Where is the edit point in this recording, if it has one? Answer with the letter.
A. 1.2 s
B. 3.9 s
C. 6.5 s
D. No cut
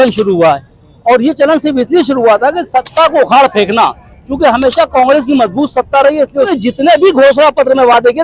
C